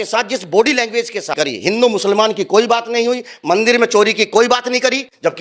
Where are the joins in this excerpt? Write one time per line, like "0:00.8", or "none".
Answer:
0:01.3